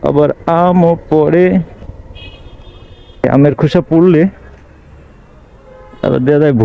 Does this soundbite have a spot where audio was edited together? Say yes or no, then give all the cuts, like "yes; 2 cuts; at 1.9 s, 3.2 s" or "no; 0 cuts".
yes; 2 cuts; at 1.8 s, 3.2 s